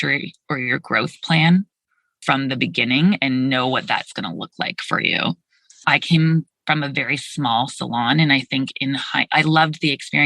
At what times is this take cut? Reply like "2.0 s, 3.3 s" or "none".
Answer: 2.2 s, 5.8 s